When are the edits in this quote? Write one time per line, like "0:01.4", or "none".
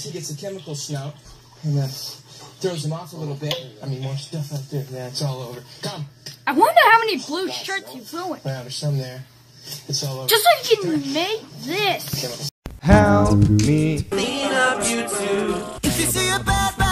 0:12.5
0:14.1
0:15.7